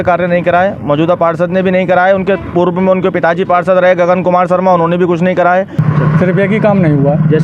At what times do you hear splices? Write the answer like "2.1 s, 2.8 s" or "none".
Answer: 5.7 s